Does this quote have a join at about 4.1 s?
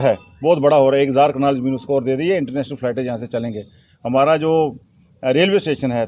no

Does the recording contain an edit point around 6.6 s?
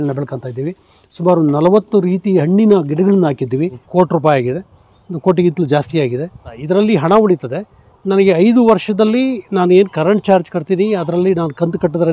yes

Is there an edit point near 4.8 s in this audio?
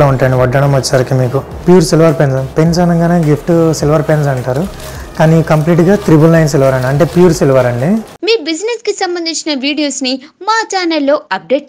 no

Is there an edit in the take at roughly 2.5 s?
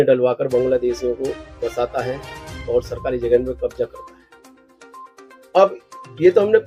no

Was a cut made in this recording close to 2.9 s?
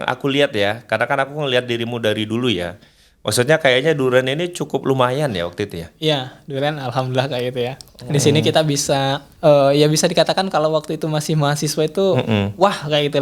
no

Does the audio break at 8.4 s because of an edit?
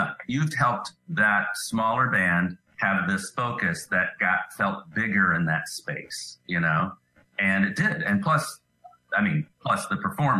no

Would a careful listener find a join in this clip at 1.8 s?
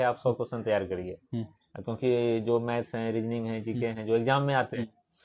no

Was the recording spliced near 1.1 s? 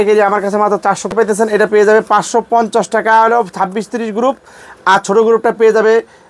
yes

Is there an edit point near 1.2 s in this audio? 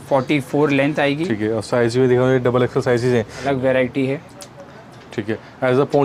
no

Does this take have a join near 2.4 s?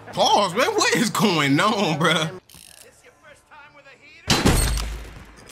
yes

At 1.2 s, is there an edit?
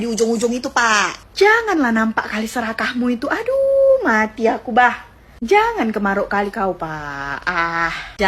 yes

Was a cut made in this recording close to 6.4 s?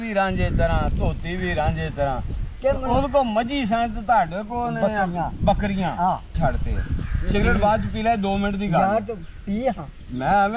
yes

